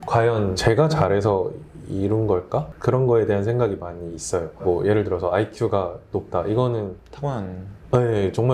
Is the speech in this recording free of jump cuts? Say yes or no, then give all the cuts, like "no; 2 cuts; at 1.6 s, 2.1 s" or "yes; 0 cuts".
yes; 0 cuts